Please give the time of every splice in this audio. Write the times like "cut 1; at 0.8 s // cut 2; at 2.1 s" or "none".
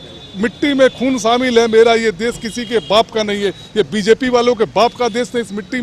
none